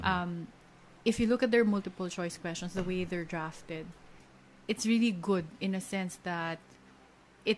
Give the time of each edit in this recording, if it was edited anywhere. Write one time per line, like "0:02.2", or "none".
none